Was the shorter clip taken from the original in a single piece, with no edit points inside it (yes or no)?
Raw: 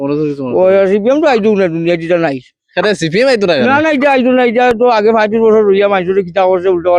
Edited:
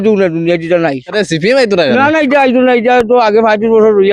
no